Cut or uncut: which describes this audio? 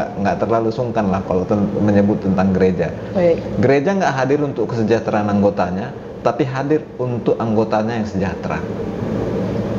uncut